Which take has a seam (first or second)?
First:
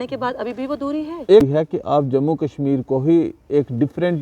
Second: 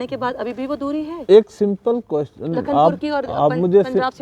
first